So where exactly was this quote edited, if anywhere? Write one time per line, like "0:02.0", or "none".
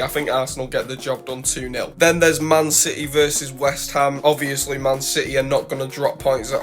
0:01.9
0:04.2

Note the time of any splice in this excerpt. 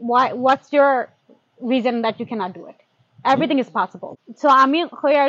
0:04.0

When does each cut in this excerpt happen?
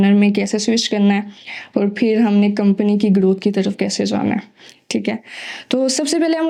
none

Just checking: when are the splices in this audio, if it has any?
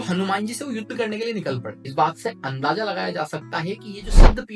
0:01.7

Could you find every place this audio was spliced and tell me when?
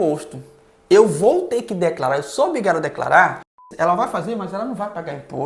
0:03.7

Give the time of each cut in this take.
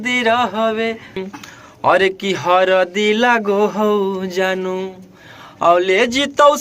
0:01.3

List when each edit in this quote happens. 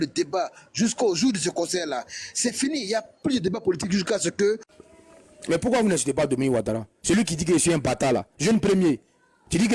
0:04.8

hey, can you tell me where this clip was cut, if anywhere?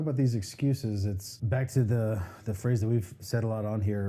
0:01.3

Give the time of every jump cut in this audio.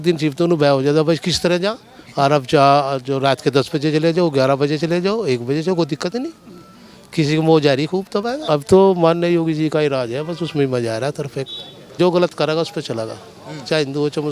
0:08.4
0:11.9

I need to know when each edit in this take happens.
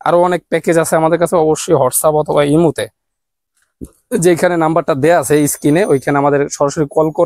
none

